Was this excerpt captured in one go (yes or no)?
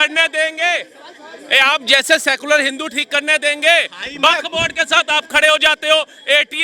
yes